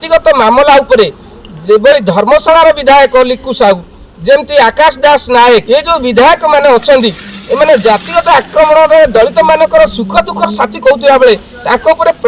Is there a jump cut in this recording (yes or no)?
no